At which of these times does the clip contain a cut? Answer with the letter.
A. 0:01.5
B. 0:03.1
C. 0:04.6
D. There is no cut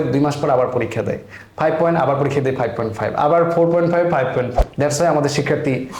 C